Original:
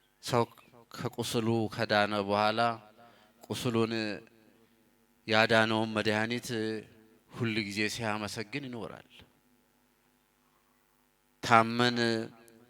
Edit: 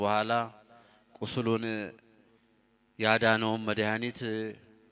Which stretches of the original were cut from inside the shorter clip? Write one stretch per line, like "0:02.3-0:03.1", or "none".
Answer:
none